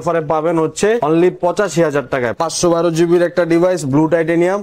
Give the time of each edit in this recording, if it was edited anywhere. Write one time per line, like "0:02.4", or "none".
0:01.0
0:02.4